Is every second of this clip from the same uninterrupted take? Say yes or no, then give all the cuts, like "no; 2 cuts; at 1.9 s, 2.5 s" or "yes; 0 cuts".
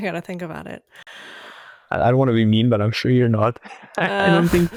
yes; 0 cuts